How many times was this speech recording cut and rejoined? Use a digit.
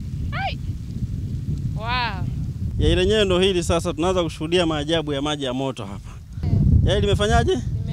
2